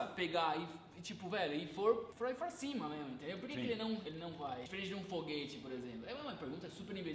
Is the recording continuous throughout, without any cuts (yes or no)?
no